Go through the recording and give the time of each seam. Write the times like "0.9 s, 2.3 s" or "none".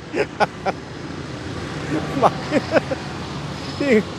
none